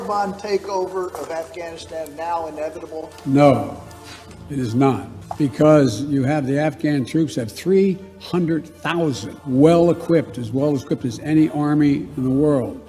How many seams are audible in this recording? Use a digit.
0